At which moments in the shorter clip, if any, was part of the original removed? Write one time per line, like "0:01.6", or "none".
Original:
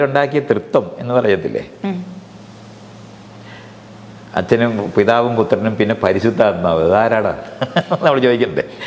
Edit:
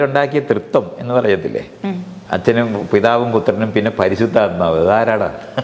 0:02.1